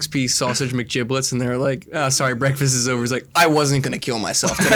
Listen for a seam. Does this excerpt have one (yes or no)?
no